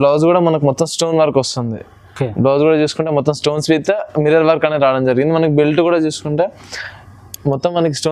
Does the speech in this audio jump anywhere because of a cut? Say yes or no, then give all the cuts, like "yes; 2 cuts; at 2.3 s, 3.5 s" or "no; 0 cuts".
no; 0 cuts